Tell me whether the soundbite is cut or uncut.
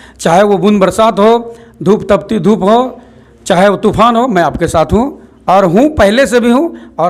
uncut